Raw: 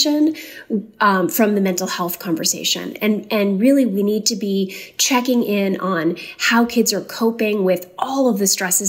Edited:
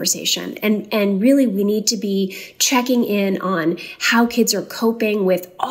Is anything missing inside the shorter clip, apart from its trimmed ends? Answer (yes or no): no